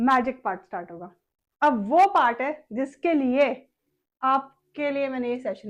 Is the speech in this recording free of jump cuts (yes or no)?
yes